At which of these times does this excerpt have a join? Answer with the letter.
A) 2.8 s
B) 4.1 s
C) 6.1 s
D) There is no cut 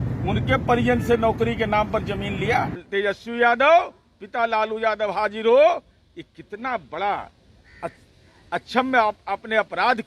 A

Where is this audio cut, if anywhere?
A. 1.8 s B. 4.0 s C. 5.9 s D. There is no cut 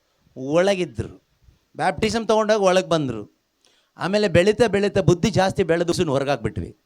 C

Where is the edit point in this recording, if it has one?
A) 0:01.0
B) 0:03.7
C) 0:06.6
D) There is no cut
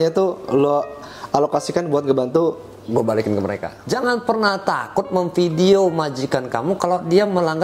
B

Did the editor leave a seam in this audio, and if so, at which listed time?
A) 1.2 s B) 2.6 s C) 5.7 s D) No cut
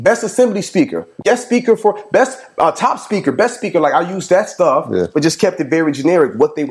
A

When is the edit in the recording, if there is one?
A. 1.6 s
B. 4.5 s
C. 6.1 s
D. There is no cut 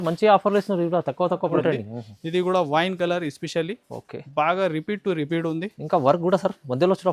A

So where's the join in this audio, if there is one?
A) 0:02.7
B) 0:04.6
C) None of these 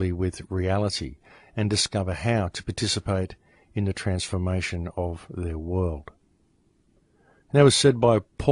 A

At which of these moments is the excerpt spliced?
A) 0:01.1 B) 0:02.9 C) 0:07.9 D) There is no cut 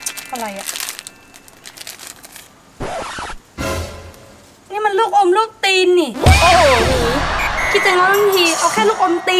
D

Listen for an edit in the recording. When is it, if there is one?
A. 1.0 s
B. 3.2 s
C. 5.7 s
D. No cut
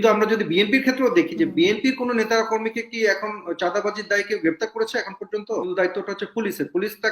C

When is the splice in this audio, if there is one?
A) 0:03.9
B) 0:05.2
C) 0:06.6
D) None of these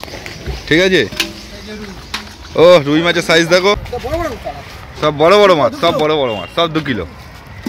A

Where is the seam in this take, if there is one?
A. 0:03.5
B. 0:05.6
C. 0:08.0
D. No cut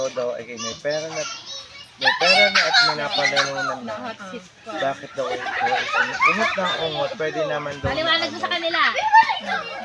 D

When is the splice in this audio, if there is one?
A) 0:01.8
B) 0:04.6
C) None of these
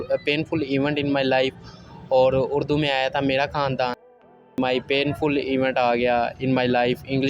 B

